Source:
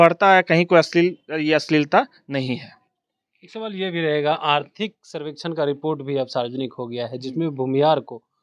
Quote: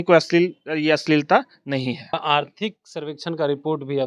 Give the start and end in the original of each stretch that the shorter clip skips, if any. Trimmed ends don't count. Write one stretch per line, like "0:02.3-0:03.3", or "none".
0:02.8-0:04.3